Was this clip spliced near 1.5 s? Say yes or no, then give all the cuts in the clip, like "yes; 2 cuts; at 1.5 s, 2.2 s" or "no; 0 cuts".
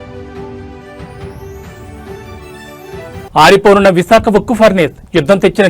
yes; 1 cut; at 1.5 s